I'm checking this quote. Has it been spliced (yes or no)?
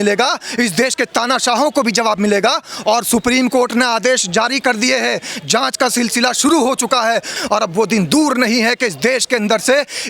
yes